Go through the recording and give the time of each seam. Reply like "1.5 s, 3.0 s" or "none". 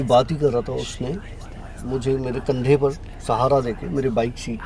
none